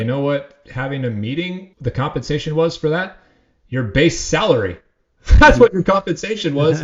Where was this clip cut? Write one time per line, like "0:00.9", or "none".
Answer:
0:01.7